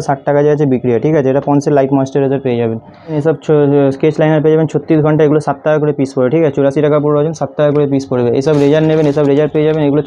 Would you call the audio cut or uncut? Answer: uncut